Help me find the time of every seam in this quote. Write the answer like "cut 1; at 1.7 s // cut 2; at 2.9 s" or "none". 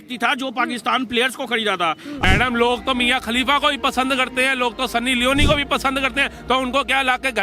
cut 1; at 2.2 s